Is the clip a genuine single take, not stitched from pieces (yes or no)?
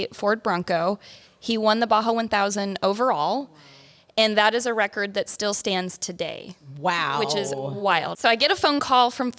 no